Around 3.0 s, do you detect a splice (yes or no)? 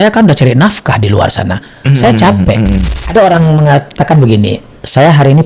yes